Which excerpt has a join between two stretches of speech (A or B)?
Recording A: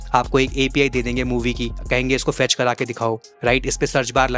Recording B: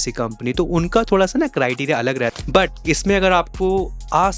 B